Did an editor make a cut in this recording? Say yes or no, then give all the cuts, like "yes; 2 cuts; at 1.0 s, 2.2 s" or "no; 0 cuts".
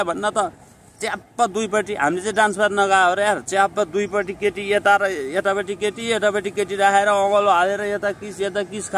no; 0 cuts